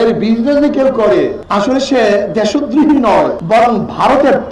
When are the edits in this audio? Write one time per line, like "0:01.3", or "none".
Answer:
0:01.4
0:03.4